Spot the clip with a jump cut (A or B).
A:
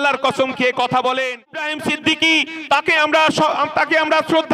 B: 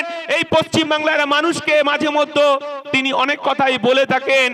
A